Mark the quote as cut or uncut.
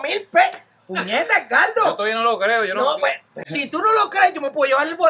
cut